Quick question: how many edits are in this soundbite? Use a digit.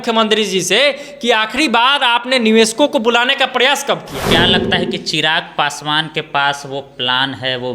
1